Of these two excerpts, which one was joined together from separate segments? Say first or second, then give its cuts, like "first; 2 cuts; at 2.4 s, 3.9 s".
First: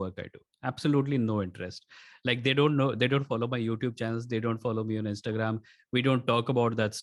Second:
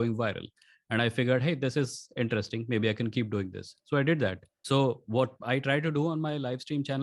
second; 1 cut; at 4.5 s